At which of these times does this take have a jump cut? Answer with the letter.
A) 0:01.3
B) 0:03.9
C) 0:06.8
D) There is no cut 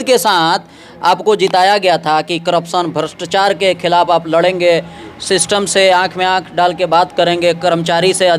D